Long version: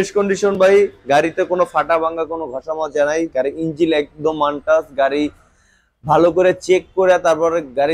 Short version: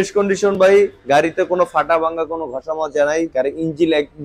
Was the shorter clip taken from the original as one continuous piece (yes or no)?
yes